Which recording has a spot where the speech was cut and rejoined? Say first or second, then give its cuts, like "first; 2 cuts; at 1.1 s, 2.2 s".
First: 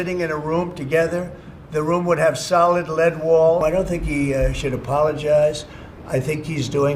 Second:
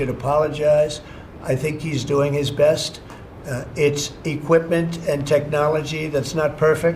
first; 1 cut; at 3.6 s